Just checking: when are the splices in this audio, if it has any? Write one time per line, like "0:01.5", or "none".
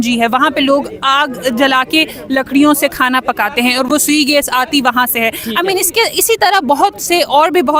none